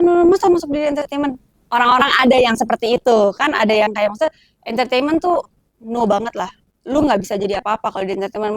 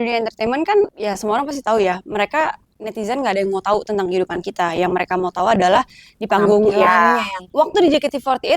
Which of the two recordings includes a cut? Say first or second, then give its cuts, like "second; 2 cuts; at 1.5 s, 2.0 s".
second; 2 cuts; at 1.0 s, 7.5 s